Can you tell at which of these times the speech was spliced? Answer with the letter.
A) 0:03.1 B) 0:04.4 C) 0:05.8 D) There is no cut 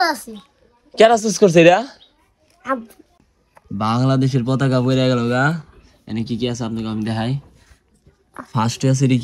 A